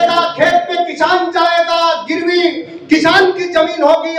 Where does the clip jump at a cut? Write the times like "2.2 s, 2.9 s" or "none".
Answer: none